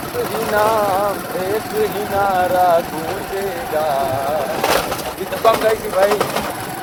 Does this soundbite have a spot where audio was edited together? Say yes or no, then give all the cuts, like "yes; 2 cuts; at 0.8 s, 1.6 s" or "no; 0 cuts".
no; 0 cuts